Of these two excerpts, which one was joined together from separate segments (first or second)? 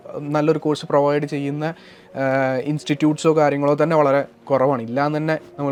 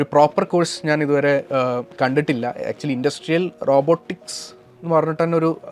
second